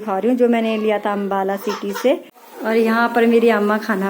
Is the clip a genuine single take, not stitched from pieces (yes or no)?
no